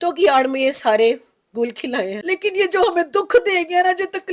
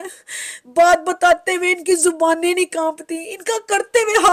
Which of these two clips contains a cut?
first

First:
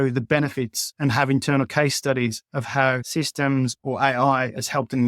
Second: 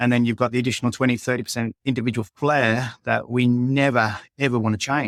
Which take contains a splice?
first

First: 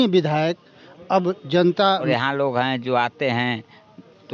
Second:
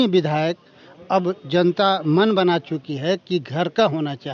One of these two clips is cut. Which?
first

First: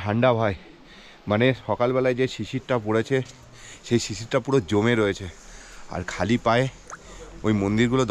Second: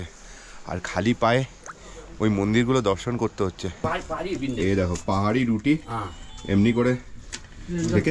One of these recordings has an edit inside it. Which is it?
second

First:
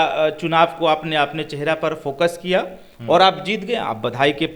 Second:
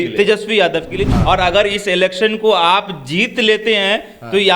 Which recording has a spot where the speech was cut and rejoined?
second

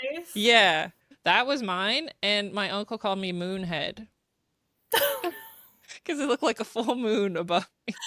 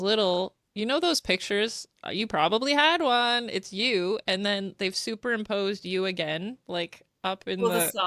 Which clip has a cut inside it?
first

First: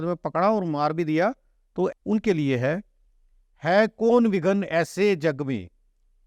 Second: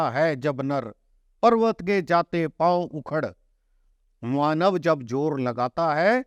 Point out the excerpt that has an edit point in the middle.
first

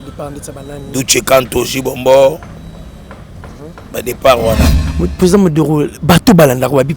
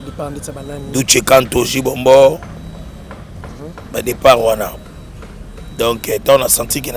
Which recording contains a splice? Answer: first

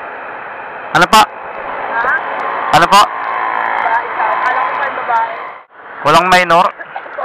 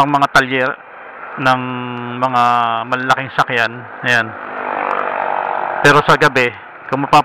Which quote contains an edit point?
first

